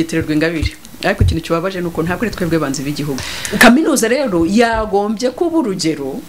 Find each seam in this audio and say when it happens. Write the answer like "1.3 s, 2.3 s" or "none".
3.2 s